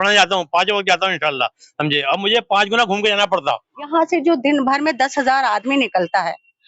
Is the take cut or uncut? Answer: cut